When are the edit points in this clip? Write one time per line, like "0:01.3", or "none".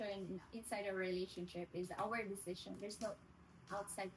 none